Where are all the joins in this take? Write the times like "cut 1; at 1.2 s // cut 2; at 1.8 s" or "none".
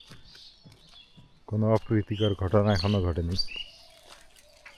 none